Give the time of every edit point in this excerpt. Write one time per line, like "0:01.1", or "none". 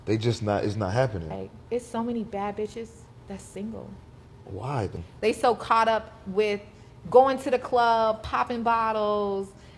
0:01.5
0:05.0